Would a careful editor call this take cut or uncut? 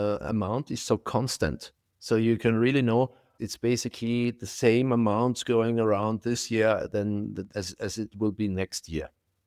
cut